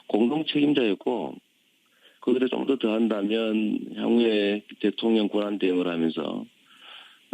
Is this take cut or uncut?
cut